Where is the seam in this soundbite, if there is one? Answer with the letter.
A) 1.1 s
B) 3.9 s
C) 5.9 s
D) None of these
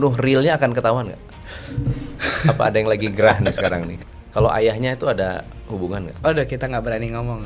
B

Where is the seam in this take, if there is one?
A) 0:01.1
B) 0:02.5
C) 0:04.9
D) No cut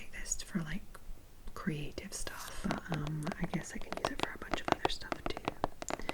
B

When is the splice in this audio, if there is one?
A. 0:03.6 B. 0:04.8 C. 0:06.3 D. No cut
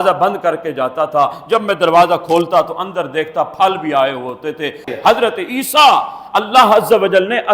B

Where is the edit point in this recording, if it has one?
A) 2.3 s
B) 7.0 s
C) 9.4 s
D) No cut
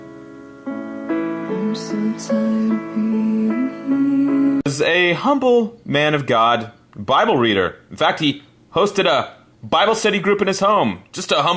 A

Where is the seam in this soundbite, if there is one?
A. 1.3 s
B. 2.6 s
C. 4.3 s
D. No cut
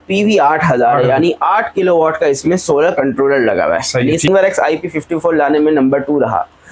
C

